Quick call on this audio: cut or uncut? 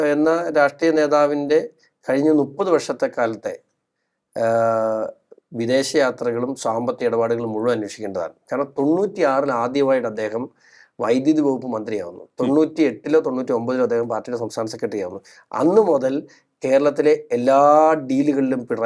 uncut